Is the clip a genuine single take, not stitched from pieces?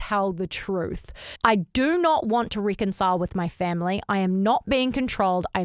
no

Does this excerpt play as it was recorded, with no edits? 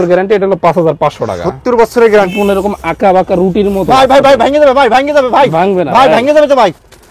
no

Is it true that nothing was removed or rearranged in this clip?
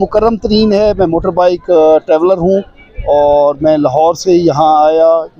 yes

